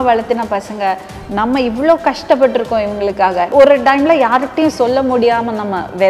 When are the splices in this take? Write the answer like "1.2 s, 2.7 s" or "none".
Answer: 3.5 s